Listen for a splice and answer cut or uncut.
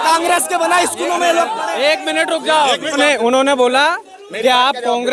cut